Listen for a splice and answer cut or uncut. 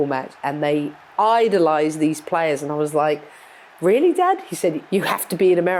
uncut